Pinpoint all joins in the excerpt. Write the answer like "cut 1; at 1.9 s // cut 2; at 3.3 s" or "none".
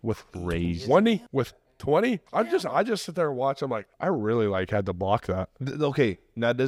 cut 1; at 1.3 s // cut 2; at 2.2 s // cut 3; at 3.9 s // cut 4; at 5.6 s

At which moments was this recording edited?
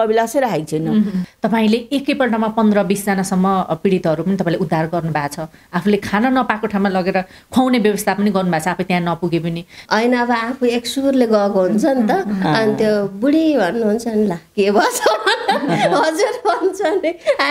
cut 1; at 1.3 s // cut 2; at 9.8 s

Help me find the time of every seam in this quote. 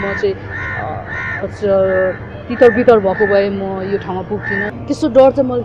cut 1; at 4.7 s

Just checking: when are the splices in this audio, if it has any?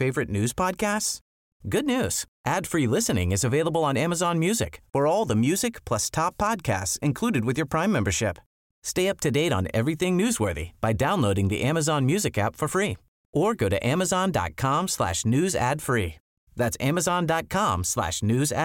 none

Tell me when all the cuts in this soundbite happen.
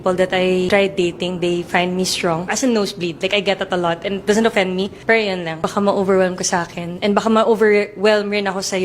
cut 1; at 4.3 s // cut 2; at 6.4 s

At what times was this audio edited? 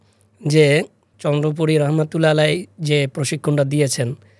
cut 1; at 1.1 s

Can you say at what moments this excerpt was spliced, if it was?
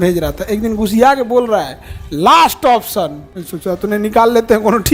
none

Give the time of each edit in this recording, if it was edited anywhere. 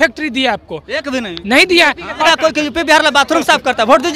cut 1; at 2.2 s

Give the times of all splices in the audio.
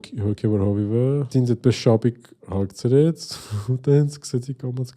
cut 1; at 1.3 s

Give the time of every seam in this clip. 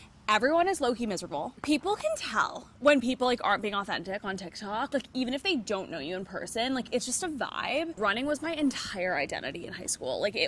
cut 1; at 1.5 s // cut 2; at 7.9 s

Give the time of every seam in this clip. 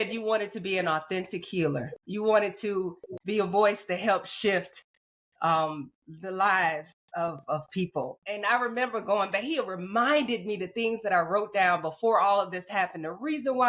cut 1; at 2.0 s // cut 2; at 8.2 s

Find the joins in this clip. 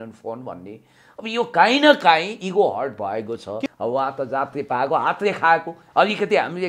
cut 1; at 3.7 s

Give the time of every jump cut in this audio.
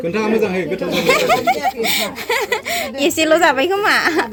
none

